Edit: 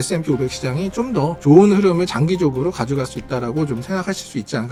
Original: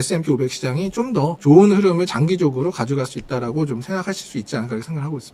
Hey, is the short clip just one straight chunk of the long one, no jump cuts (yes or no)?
yes